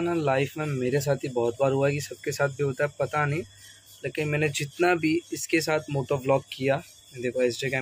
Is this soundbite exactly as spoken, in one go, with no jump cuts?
yes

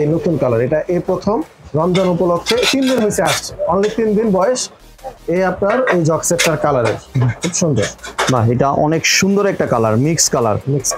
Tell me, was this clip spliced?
no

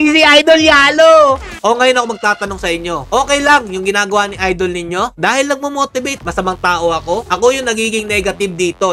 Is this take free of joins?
no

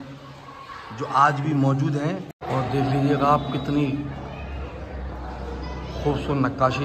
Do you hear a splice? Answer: yes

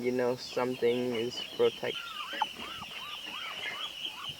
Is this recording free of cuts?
no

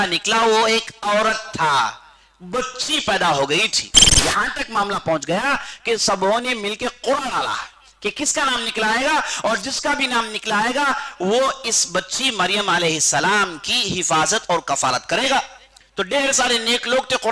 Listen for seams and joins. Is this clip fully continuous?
no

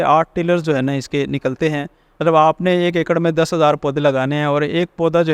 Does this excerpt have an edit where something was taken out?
no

